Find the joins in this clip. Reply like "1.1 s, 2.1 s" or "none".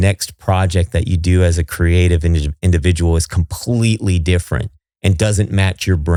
none